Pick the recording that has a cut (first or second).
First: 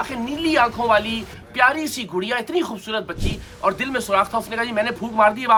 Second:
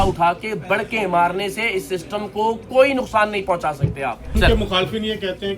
second